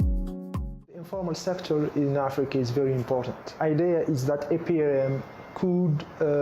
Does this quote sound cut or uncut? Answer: cut